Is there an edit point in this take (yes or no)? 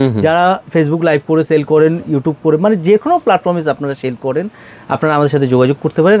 no